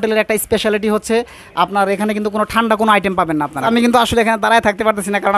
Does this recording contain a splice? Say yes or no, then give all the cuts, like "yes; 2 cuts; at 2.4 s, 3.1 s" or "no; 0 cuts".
yes; 1 cut; at 3.6 s